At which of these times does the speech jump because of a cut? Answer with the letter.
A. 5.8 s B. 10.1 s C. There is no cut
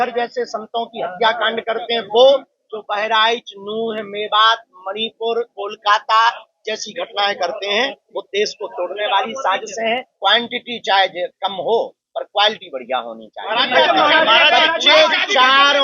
B